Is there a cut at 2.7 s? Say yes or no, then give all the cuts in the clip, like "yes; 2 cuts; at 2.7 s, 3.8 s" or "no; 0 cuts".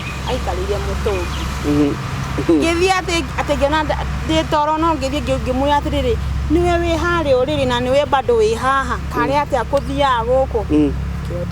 no; 0 cuts